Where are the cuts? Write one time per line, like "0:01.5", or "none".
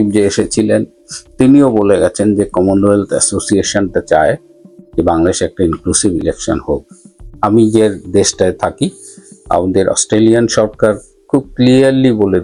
none